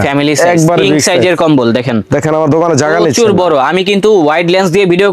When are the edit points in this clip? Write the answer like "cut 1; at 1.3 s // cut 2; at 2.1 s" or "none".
none